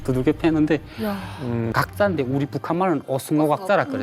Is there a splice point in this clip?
yes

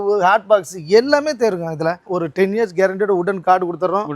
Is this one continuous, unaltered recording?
no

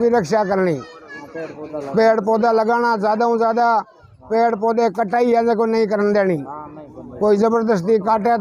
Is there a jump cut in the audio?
no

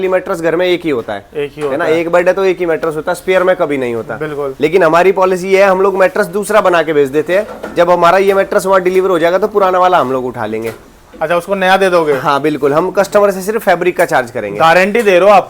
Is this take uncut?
yes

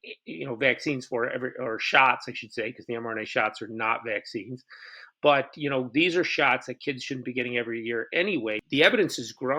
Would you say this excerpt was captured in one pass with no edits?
no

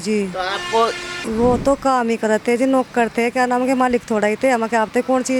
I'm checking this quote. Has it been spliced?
yes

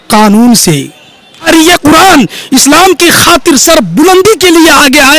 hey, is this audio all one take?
no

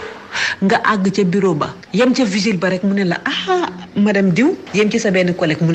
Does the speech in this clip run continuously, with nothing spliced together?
no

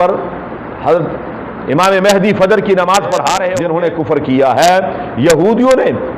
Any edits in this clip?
yes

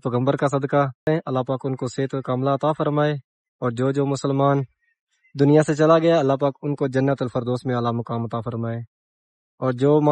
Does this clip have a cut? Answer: yes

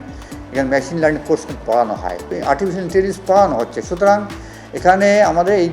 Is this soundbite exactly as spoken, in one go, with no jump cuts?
no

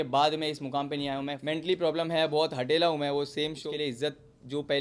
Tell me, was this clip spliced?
yes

